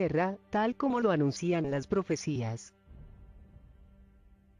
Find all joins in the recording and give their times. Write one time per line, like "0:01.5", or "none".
none